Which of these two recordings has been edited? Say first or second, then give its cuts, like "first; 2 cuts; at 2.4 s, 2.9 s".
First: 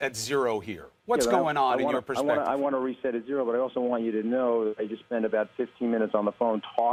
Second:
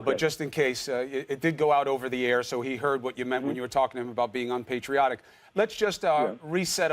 second; 1 cut; at 4.3 s